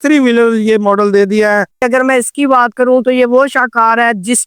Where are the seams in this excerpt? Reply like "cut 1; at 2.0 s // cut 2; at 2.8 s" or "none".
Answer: cut 1; at 1.8 s